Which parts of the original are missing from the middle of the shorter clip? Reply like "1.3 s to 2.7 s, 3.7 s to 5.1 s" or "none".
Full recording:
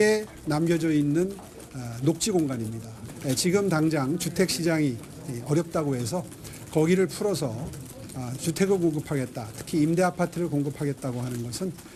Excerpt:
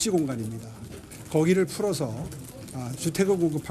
3.1 s to 6.3 s